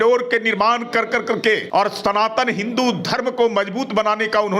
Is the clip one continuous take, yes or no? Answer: no